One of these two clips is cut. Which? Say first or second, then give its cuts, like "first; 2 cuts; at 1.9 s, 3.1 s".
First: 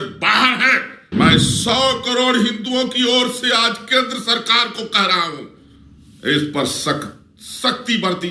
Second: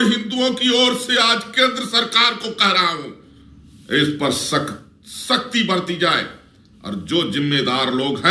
first; 1 cut; at 1.0 s